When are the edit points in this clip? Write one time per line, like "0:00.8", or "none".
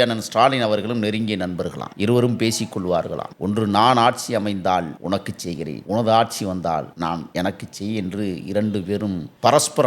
none

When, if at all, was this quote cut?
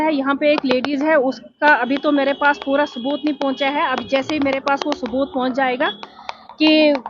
none

